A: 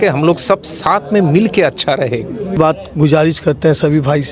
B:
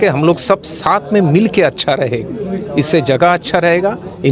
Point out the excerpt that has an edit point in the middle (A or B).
A